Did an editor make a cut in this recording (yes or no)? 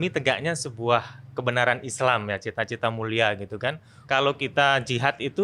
yes